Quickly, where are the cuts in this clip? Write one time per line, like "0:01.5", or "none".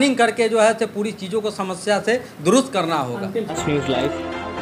0:03.5